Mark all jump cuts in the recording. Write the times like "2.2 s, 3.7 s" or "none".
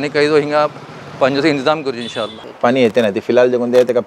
none

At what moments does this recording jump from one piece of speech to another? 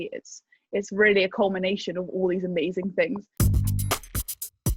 3.3 s

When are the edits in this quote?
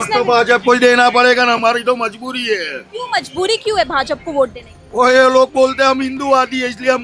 none

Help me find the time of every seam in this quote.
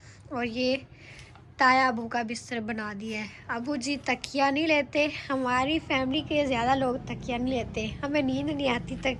none

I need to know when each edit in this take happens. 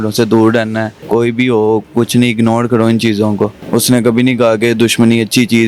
0.9 s, 3.6 s

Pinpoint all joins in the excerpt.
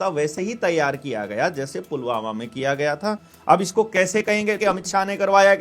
3.3 s, 4.6 s

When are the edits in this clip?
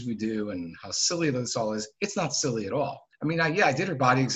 3.0 s

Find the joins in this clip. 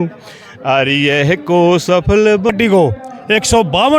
2.5 s

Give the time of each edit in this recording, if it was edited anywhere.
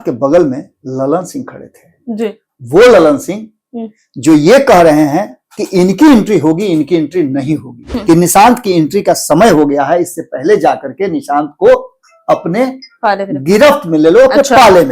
7.9 s

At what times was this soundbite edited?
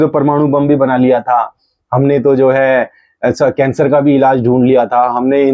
none

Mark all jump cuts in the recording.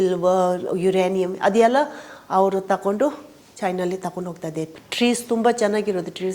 4.8 s

